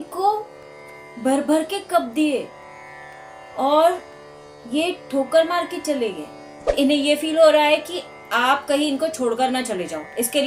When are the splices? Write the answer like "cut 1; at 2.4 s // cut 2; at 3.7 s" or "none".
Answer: cut 1; at 6.8 s